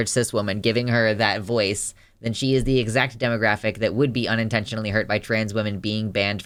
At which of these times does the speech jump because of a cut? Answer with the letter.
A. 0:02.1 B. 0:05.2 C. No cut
C